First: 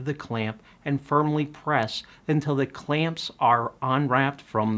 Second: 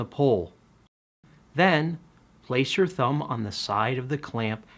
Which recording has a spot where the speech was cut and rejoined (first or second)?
second